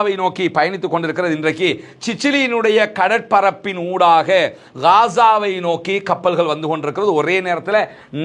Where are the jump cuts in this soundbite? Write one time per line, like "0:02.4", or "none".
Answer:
none